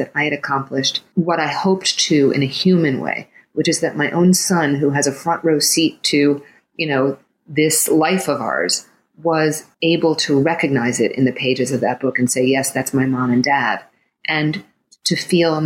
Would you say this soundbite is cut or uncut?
cut